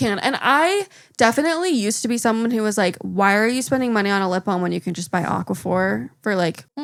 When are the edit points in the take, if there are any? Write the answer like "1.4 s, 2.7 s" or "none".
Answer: none